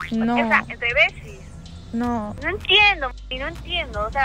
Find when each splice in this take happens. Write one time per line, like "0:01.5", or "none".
0:02.4